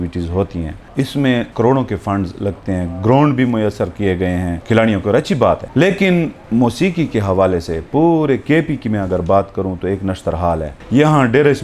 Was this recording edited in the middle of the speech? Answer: yes; 4 cuts; at 1.3 s, 4.5 s, 5.7 s, 6.4 s

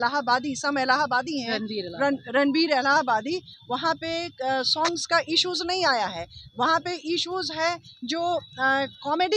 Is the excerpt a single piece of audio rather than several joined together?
yes; 0 cuts

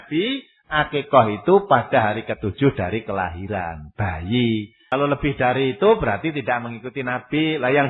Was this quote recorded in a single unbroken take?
no; 1 cut; at 4.8 s

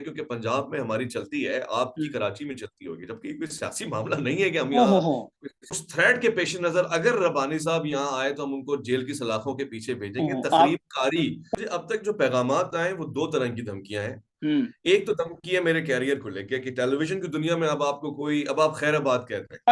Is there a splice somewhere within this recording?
yes; 2 cuts; at 5.8 s, 11.5 s

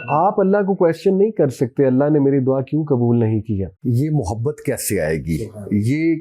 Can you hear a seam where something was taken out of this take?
yes; 1 cut; at 3.7 s

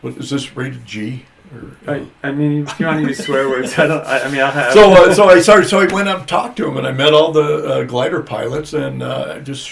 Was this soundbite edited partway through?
no; 0 cuts

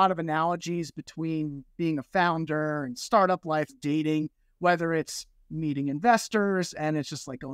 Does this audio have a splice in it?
yes; 1 cut; at 3.7 s

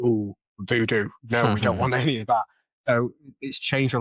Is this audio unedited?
yes; 0 cuts

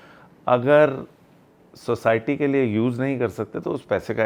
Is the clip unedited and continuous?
yes; 0 cuts

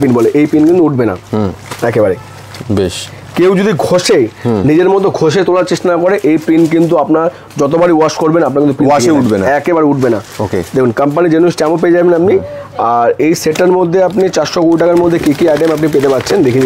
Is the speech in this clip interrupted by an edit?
no; 0 cuts

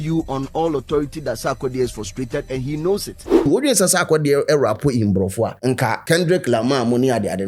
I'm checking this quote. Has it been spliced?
yes; 2 cuts; at 3.5 s, 5.9 s

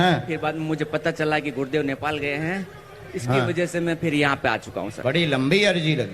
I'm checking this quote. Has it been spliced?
yes; 1 cut; at 4.8 s

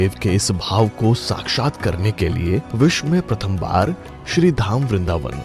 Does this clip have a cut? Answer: no; 0 cuts

